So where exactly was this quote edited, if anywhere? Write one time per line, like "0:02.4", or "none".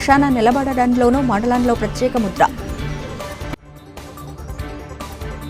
0:02.5

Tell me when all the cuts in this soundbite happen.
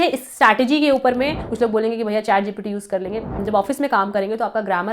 0:01.4
0:03.4

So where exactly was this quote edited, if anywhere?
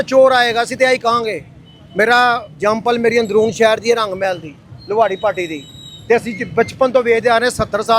none

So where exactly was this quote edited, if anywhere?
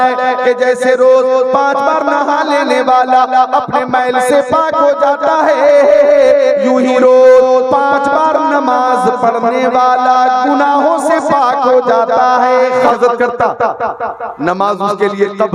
0:12.9

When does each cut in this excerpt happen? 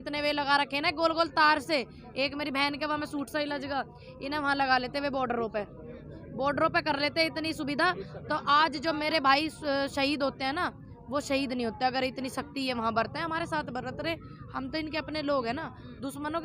none

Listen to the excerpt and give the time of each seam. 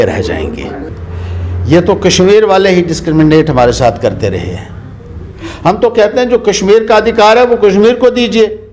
0:00.9

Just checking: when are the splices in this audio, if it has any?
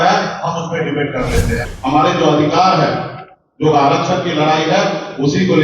0:01.6

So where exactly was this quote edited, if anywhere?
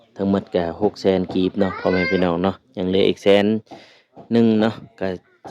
none

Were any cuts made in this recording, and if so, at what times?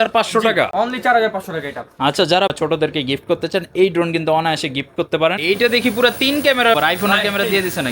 0:02.5
0:05.4
0:06.8

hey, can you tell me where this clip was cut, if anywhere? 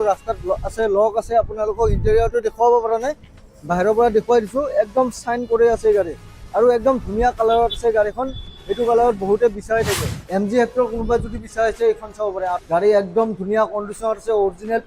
0:10.1
0:12.6

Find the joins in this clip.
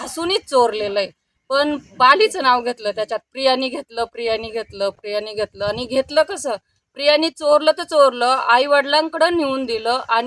none

